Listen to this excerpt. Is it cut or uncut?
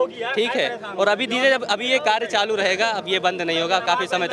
uncut